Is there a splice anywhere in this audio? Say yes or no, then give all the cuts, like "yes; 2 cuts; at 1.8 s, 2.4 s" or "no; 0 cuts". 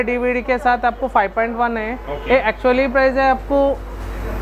no; 0 cuts